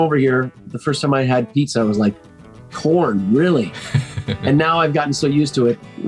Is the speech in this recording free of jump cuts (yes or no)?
yes